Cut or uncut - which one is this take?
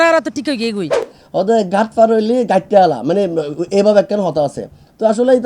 cut